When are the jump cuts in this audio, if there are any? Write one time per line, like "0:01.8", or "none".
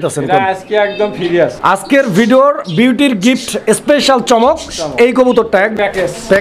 0:01.8
0:05.5